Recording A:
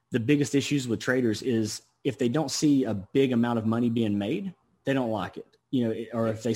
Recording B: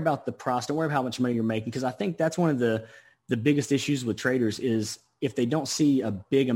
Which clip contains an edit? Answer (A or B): A